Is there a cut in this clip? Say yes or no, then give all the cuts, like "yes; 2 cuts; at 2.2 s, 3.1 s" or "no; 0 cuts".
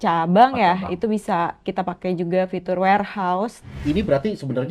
yes; 1 cut; at 3.7 s